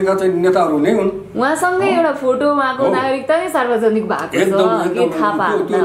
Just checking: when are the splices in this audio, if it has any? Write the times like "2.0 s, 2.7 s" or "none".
none